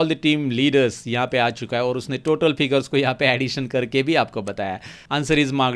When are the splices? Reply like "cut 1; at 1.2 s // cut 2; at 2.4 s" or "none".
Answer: none